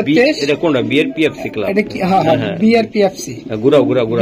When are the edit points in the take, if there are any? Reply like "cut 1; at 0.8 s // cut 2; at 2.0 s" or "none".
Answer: none